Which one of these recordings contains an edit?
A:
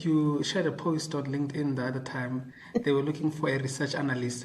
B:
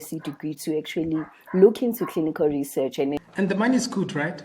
B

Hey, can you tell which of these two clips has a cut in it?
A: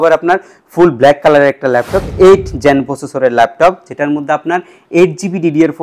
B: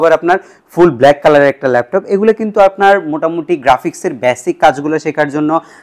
A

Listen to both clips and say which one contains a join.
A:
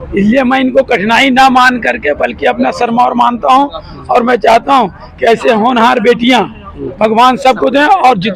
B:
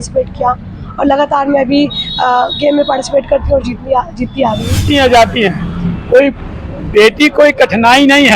B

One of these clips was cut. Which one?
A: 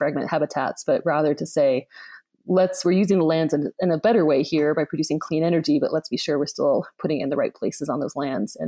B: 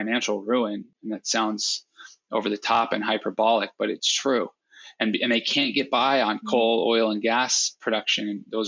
B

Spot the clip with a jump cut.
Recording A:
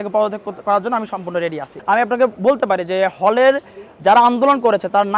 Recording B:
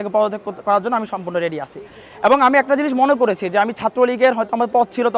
A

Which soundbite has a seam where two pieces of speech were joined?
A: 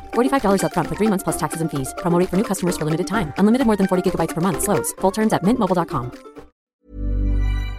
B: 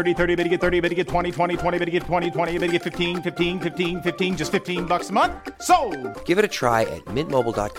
A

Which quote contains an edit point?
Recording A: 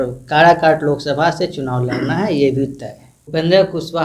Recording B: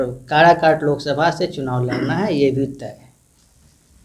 A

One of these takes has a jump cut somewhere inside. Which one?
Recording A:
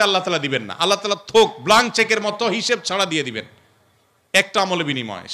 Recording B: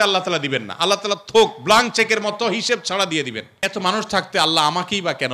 B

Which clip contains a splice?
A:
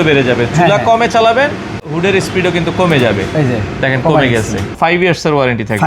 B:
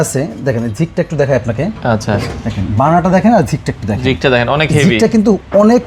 A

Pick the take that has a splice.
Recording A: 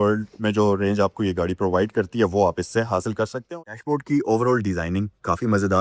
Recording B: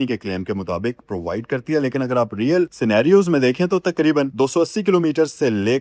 A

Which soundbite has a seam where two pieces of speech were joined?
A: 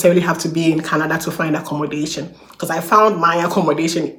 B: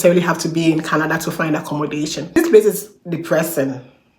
B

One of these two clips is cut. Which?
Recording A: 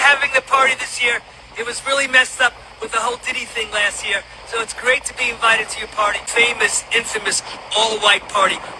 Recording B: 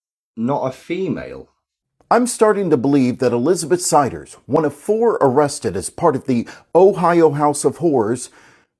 B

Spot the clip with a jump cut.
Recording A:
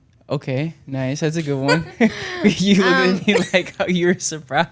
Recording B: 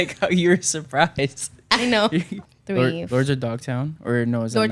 B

